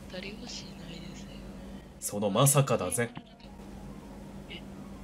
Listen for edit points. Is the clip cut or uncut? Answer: uncut